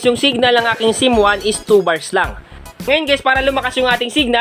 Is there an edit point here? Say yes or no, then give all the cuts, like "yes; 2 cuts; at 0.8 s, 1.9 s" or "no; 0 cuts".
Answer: yes; 1 cut; at 2.5 s